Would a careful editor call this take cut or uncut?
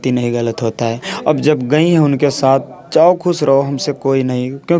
uncut